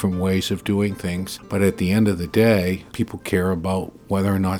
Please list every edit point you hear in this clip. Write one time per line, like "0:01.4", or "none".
0:01.3
0:02.9